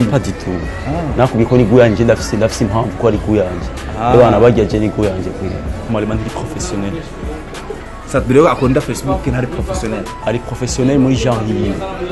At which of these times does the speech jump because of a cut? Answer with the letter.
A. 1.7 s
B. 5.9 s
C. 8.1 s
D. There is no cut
B